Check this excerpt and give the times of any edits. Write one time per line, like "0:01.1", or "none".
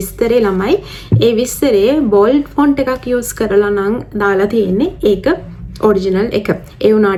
none